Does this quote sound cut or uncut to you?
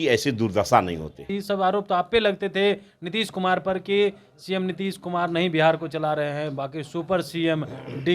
cut